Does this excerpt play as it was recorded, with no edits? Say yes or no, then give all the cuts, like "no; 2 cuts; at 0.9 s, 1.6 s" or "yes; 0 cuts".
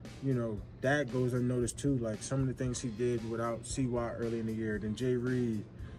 no; 1 cut; at 2.2 s